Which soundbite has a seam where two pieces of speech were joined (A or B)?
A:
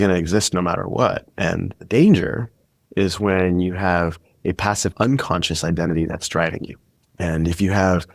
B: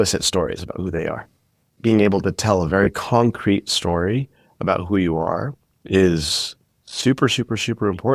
B